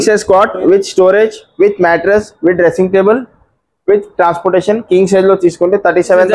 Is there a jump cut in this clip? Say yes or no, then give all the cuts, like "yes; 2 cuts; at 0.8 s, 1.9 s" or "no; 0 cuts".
no; 0 cuts